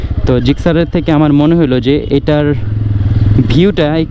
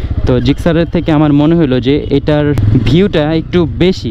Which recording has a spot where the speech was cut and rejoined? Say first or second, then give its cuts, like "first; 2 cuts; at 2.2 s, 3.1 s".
second; 1 cut; at 2.6 s